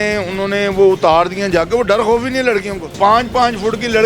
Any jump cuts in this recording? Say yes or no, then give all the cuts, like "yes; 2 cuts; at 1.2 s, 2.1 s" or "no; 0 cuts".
yes; 1 cut; at 2.9 s